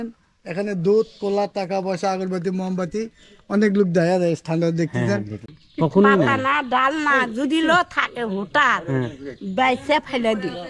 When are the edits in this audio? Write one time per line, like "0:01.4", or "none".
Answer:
0:05.5